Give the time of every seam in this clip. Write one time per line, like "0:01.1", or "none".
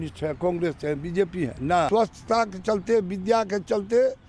0:01.9